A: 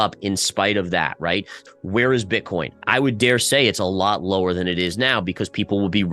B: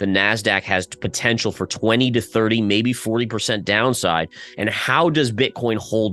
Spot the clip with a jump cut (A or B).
A